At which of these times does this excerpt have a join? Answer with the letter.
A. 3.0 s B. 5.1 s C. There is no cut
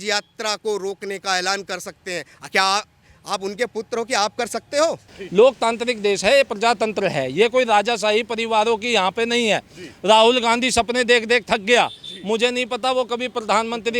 B